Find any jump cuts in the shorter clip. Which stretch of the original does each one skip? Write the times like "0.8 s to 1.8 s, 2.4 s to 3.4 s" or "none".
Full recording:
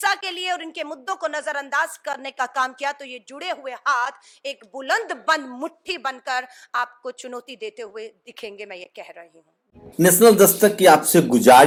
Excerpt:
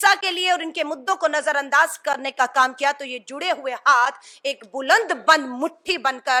none